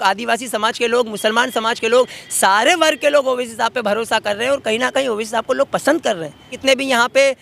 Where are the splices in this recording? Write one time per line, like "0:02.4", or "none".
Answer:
0:06.5